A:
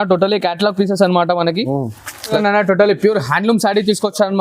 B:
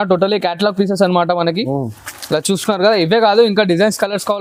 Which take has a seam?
A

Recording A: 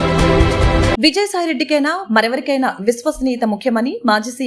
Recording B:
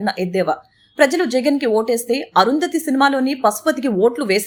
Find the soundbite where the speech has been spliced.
A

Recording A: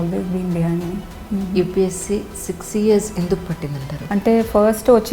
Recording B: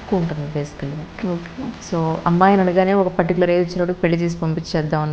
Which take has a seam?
A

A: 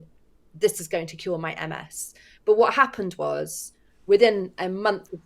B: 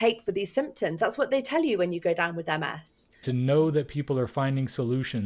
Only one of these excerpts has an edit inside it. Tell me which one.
B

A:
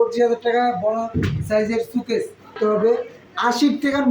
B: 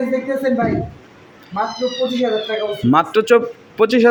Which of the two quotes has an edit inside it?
A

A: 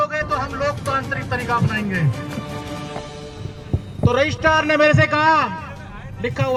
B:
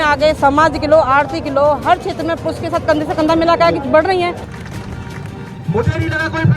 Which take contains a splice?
B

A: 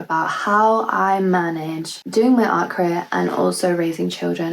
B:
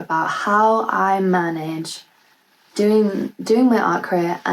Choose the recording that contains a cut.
A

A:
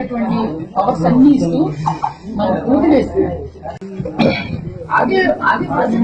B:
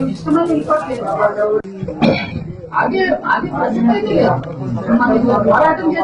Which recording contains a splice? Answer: B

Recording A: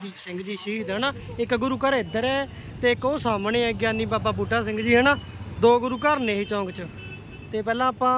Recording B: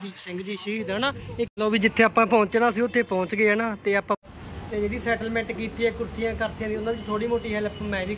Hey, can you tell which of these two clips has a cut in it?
B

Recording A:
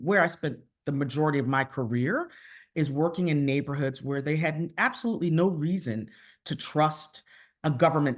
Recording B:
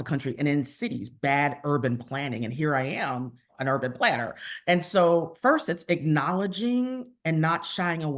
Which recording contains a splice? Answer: B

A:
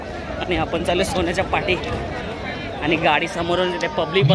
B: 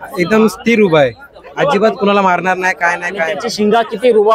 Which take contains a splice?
B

